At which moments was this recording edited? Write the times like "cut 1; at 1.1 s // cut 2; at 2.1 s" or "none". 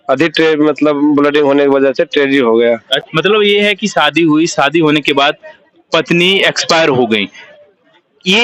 cut 1; at 2.9 s